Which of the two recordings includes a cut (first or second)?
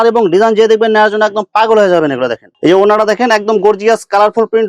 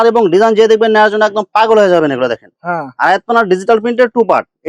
first